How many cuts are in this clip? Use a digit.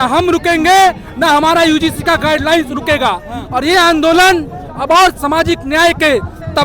0